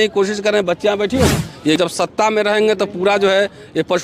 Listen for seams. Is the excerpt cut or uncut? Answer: cut